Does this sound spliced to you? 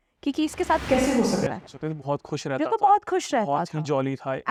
no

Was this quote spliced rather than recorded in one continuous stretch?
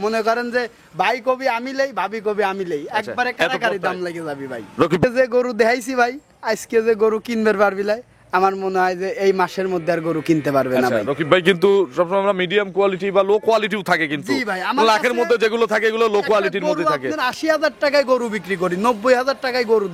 yes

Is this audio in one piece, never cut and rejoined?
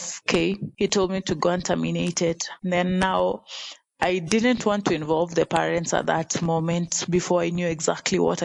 yes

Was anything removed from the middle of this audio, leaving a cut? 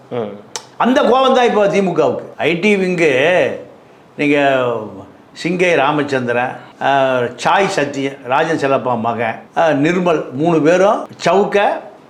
no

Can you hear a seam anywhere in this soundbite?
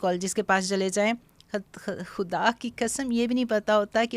no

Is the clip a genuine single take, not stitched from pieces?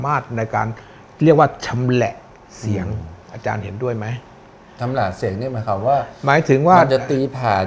yes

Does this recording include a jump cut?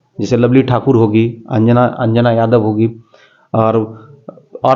no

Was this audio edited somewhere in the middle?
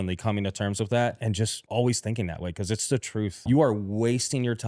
yes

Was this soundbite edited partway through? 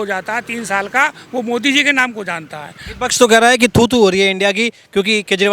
no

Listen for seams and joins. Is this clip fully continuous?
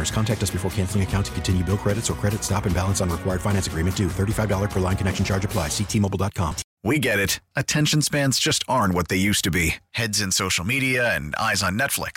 no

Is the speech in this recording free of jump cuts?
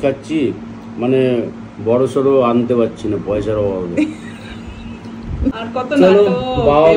no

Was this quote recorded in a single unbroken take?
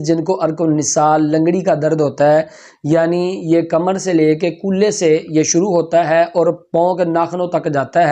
yes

